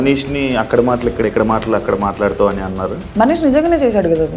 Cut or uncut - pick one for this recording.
uncut